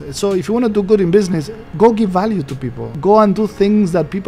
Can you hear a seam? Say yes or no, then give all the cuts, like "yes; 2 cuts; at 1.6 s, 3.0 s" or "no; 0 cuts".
yes; 1 cut; at 2.9 s